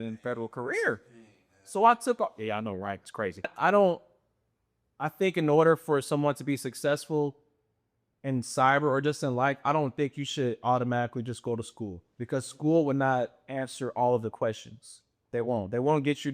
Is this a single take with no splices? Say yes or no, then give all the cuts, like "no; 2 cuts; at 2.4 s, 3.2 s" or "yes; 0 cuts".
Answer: no; 1 cut; at 3.5 s